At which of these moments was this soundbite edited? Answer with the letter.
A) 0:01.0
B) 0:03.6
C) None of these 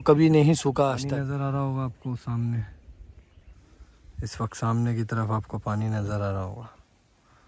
A